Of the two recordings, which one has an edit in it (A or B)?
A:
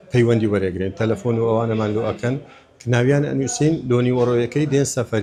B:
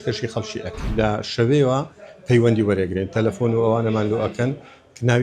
B